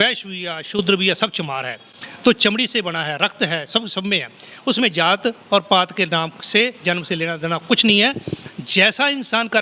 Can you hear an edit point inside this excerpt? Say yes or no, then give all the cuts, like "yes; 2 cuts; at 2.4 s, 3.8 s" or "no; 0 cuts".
no; 0 cuts